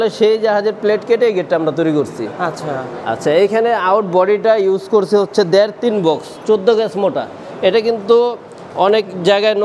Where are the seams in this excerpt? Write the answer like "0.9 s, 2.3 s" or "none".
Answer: none